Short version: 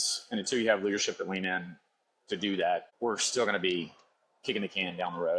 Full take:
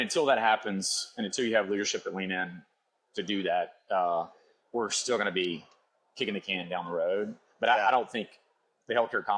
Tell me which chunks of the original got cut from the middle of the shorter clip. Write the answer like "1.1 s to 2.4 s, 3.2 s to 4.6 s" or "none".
3.8 s to 4.6 s